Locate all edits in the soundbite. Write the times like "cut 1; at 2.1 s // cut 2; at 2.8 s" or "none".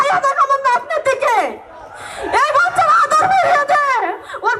none